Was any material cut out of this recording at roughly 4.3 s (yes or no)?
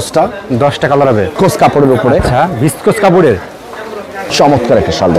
yes